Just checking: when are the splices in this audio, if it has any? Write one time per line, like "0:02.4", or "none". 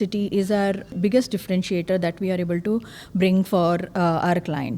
0:00.9